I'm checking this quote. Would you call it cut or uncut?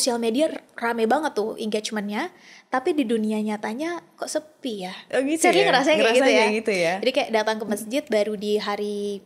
uncut